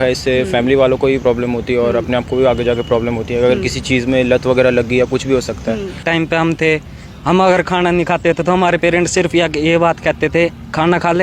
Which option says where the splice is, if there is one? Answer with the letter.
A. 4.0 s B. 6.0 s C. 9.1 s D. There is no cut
B